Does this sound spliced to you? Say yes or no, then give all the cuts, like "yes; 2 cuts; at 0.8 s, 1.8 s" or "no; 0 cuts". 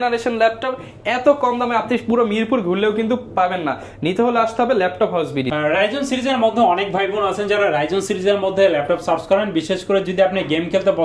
no; 0 cuts